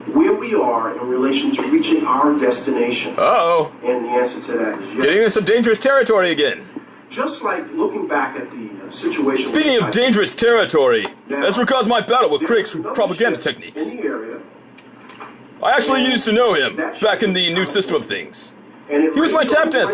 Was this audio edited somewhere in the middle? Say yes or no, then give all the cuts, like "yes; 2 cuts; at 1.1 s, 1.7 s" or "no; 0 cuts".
no; 0 cuts